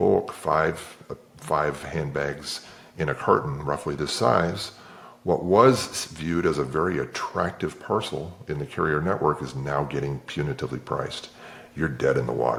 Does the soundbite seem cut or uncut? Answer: uncut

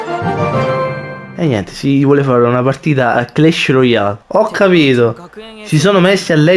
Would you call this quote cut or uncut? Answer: uncut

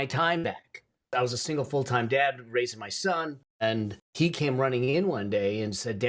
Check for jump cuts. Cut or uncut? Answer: cut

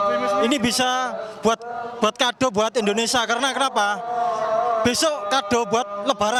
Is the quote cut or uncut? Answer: uncut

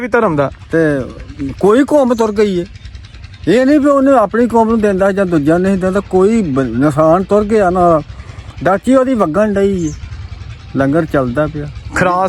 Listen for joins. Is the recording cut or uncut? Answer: uncut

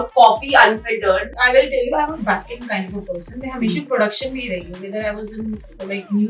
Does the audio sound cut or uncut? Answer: cut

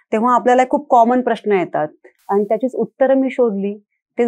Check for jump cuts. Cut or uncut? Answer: cut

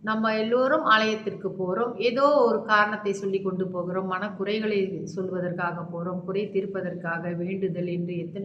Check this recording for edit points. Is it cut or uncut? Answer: uncut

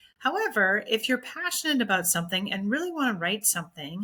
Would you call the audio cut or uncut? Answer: uncut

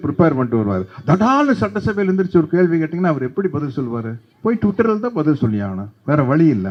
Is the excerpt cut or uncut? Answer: uncut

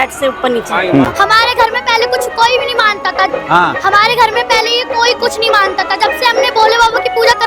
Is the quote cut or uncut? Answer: cut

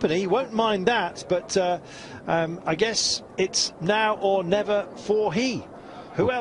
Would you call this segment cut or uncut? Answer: cut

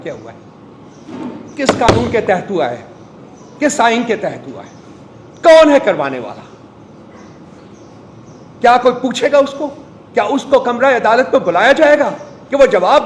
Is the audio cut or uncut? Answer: uncut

